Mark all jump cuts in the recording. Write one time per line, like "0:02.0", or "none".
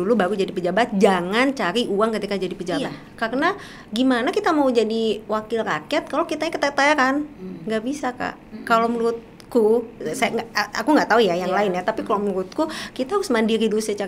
0:03.0